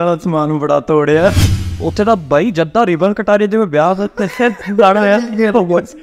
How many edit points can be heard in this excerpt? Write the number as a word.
one